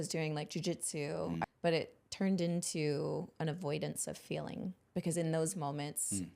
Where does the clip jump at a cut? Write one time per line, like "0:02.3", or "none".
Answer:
0:01.5